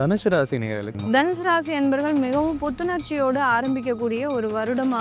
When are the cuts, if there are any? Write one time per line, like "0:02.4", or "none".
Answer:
0:00.9

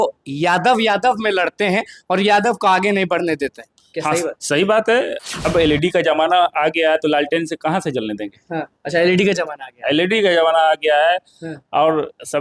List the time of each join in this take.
0:05.2

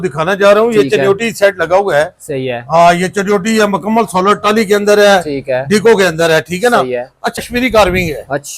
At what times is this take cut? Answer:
0:07.4

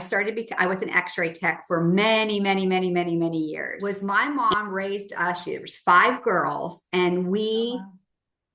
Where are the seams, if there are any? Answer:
0:03.7

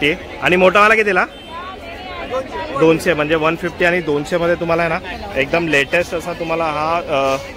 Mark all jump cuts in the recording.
none

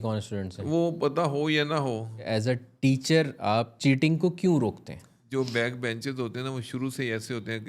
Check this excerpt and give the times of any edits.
0:02.3
0:03.7
0:05.2

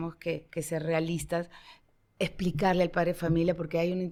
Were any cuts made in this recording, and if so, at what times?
none

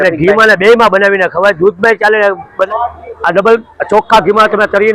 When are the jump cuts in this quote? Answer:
0:02.7

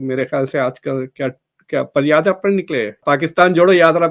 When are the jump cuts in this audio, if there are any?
0:03.0

